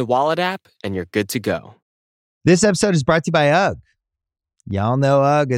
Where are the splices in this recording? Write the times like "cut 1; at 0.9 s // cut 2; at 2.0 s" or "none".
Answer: cut 1; at 2.2 s